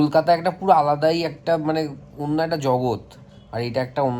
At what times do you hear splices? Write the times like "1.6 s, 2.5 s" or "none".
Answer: none